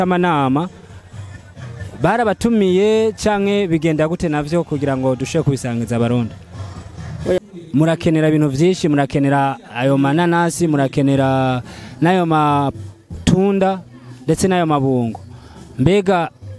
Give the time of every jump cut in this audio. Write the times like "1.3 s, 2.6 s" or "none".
7.4 s